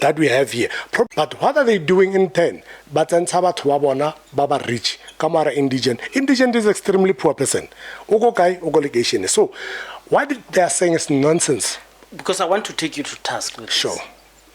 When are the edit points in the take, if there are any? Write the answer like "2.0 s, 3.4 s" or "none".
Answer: 1.1 s